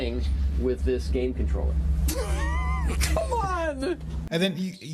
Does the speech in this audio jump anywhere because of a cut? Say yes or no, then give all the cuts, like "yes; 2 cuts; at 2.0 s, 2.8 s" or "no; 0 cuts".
yes; 1 cut; at 3.7 s